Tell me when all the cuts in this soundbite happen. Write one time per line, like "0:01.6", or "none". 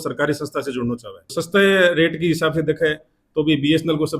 0:01.4